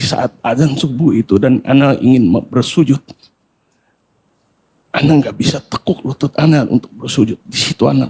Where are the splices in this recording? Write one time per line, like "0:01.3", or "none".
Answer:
none